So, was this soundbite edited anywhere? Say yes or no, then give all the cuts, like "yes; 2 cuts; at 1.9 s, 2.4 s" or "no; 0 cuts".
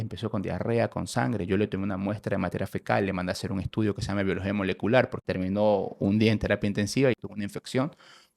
yes; 2 cuts; at 5.2 s, 7.2 s